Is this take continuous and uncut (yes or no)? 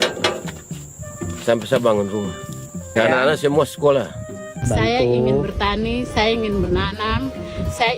no